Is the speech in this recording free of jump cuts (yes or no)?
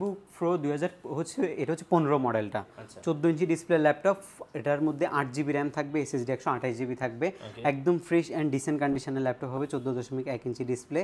yes